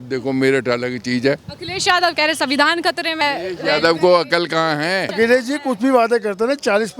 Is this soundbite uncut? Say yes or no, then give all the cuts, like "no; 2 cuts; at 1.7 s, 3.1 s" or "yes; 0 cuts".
no; 2 cuts; at 3.2 s, 5.1 s